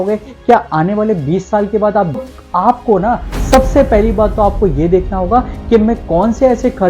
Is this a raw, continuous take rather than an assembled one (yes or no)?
no